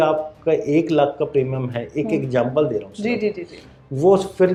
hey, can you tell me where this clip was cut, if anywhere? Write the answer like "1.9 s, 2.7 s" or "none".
none